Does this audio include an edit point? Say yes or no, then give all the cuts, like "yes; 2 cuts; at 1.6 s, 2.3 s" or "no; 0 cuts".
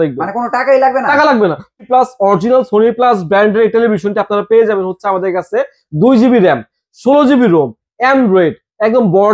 yes; 1 cut; at 1.9 s